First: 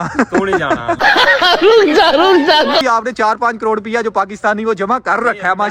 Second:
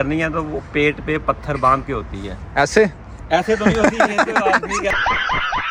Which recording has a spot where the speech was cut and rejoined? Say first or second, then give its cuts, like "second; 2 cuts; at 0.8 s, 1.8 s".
first; 1 cut; at 2.8 s